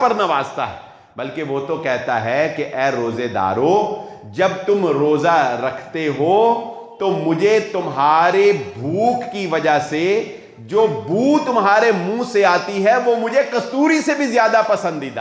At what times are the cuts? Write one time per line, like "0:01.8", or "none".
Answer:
none